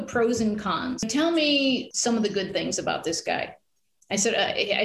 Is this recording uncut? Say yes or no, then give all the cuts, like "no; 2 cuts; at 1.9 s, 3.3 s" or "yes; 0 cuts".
no; 2 cuts; at 1.0 s, 1.9 s